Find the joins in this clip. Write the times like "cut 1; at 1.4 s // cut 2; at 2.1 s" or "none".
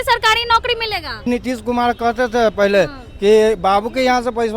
cut 1; at 1.3 s